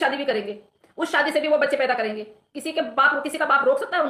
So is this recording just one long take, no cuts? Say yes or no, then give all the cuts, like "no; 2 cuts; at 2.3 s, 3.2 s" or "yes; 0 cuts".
yes; 0 cuts